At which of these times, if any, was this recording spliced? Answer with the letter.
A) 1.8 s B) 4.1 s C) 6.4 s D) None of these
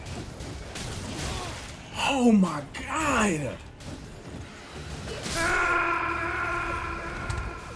D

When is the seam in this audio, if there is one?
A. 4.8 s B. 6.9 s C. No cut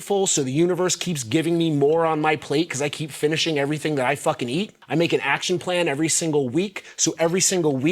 A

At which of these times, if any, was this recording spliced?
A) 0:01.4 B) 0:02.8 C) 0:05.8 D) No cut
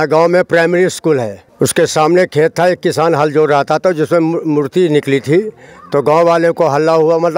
A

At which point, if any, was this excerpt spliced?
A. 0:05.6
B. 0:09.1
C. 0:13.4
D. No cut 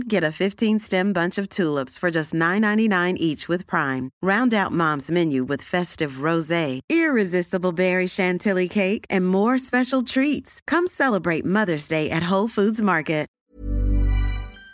C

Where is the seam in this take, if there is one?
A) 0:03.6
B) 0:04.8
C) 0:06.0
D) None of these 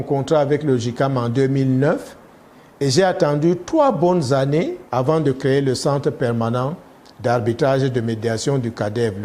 B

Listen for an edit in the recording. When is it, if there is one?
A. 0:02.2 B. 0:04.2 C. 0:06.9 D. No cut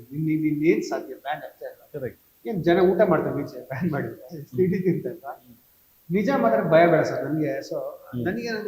D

